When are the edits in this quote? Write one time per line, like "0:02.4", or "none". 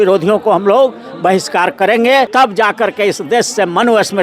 0:02.3